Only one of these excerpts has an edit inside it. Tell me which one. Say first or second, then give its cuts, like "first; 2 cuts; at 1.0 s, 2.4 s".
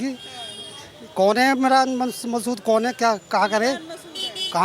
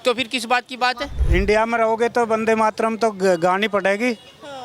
second; 1 cut; at 1.2 s